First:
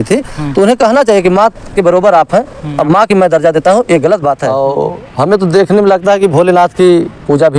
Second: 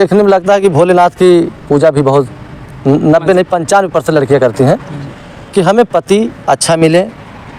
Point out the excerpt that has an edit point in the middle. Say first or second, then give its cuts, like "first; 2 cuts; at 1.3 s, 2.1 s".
first; 1 cut; at 4.4 s